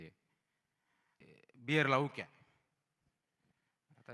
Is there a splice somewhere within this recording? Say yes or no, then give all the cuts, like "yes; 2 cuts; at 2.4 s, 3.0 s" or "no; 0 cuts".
yes; 1 cut; at 1.2 s